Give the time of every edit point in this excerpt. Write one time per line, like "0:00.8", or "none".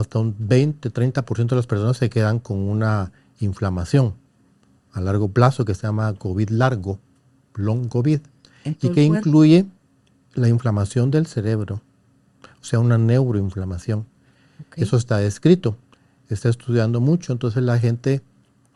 none

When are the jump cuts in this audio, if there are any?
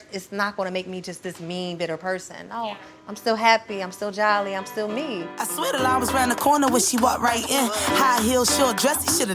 0:05.4

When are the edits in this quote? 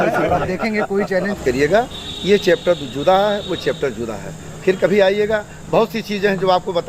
0:01.4

